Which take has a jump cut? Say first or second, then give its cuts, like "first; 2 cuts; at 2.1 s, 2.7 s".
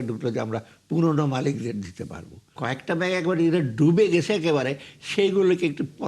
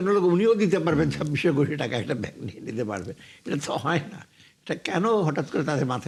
first; 1 cut; at 2.5 s